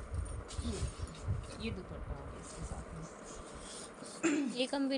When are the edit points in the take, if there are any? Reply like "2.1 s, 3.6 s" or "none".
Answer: none

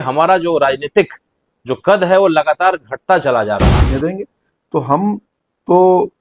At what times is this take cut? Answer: 3.7 s

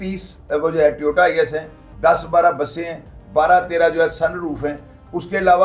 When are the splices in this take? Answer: none

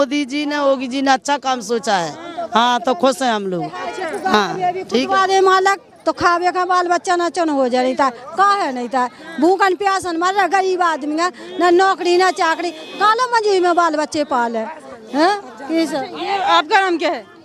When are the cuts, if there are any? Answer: none

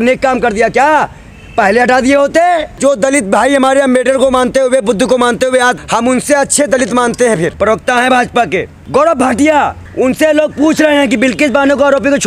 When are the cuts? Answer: 2.7 s, 5.8 s, 7.5 s, 8.8 s, 9.8 s

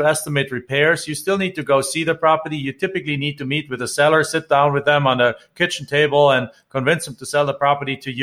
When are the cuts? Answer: none

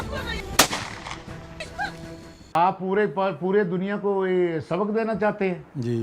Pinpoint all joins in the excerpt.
2.5 s

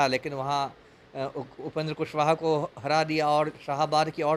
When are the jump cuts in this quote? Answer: none

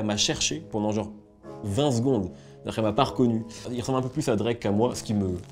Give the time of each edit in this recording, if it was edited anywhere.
3.6 s

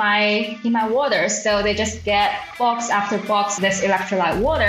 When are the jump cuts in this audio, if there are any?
2.4 s, 3.5 s

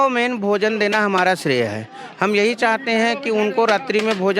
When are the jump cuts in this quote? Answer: none

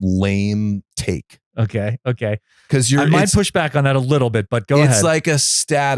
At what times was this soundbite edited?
0.9 s

